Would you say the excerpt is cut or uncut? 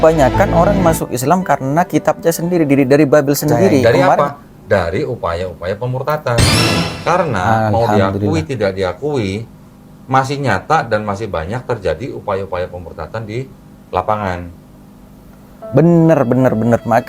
cut